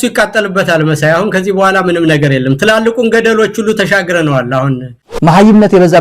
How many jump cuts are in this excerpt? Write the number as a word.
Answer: one